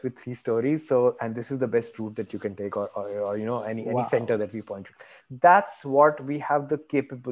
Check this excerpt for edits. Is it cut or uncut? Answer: uncut